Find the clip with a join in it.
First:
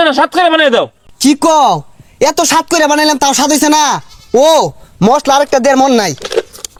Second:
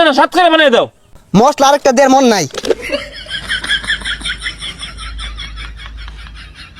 second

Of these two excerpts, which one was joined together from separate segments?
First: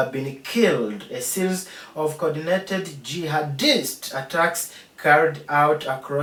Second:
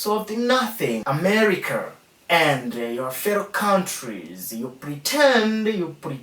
second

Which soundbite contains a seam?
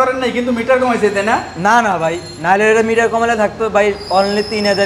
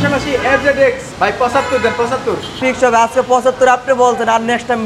second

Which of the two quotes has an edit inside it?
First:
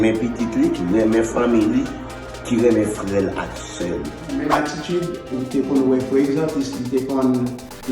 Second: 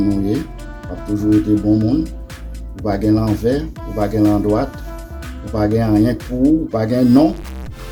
first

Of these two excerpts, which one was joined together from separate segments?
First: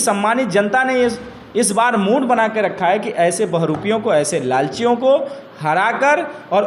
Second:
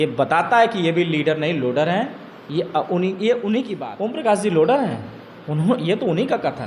second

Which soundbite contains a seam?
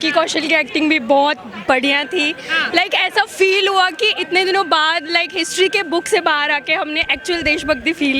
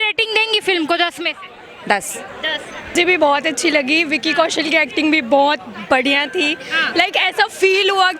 second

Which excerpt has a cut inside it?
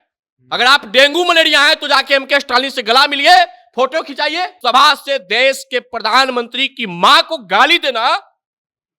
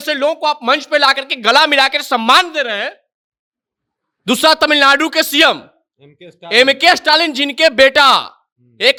first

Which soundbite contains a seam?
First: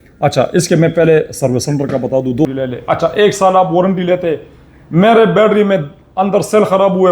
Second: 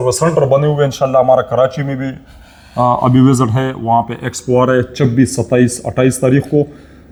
first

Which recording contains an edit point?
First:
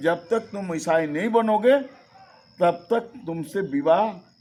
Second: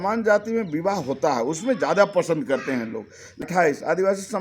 second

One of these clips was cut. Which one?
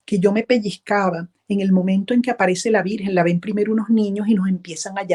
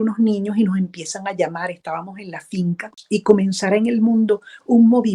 second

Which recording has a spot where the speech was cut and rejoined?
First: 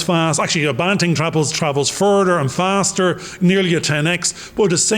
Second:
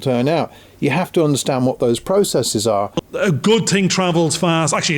second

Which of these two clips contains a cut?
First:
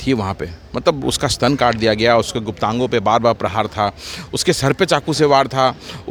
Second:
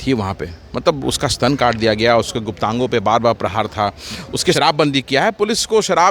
second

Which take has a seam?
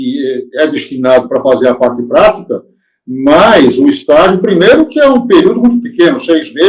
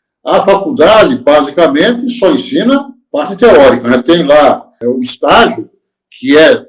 second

